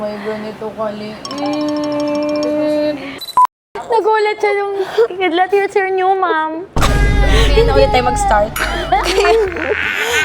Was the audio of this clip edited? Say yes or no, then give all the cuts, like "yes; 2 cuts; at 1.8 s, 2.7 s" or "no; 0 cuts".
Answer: yes; 1 cut; at 3.3 s